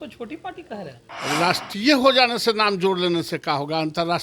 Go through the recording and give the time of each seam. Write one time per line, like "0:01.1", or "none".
none